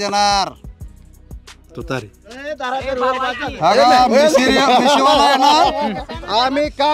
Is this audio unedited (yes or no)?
yes